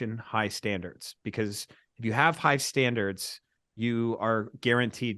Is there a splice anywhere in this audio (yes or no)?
no